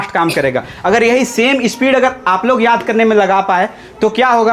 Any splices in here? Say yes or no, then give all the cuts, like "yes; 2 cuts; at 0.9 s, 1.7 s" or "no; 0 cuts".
no; 0 cuts